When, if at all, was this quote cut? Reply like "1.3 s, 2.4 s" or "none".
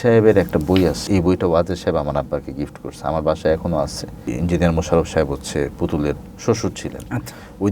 1.0 s, 4.3 s